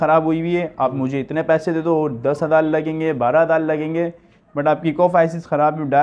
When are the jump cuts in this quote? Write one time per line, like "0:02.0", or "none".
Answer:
none